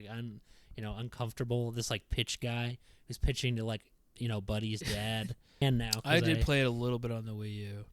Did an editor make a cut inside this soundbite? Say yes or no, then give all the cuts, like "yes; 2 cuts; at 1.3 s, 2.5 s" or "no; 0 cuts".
yes; 1 cut; at 5.6 s